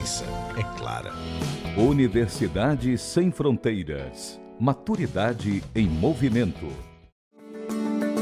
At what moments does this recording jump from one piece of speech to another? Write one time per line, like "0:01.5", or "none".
0:07.3